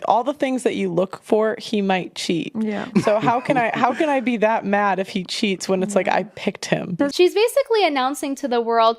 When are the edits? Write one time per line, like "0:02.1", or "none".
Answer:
0:06.9